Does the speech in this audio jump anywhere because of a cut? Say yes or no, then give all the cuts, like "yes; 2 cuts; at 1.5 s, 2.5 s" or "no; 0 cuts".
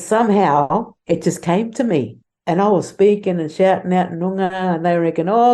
no; 0 cuts